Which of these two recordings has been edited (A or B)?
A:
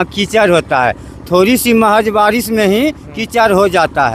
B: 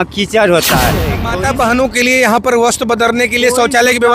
B